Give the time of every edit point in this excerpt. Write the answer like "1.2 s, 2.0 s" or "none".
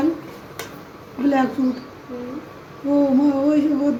none